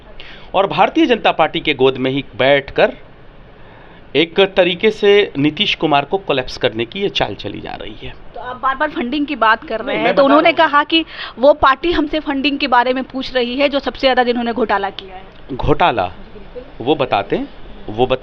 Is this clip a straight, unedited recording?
yes; 0 cuts

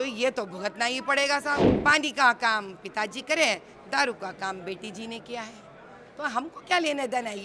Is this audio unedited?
no; 1 cut; at 1.7 s

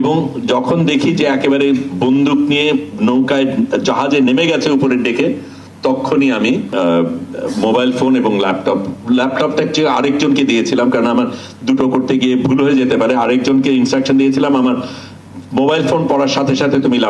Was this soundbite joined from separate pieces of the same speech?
yes; 1 cut; at 6.7 s

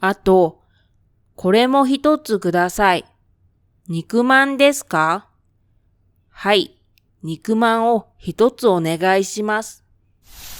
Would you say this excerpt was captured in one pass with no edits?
yes; 0 cuts

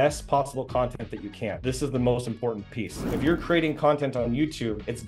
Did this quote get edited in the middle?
yes; 1 cut; at 3.0 s

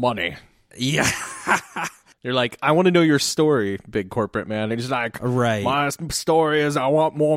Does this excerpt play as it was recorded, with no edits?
yes; 0 cuts

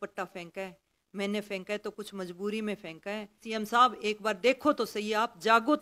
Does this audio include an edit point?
yes; 1 cut; at 3.4 s

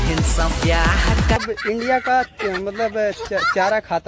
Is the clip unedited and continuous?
no; 1 cut; at 1.4 s

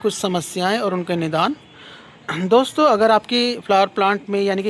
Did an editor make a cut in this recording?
no; 0 cuts

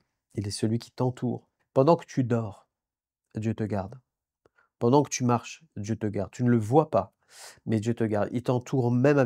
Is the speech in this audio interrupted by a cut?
yes; 1 cut; at 1.5 s

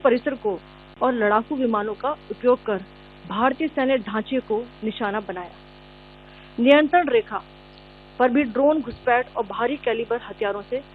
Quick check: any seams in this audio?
yes; 1 cut; at 0.9 s

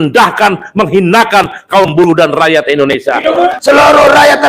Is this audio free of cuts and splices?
no; 1 cut; at 3.5 s

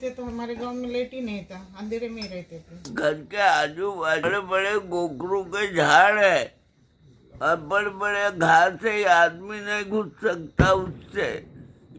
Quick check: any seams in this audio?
yes; 2 cuts; at 2.9 s, 4.3 s

